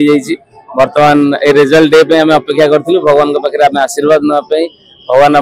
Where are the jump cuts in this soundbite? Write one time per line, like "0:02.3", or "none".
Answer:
none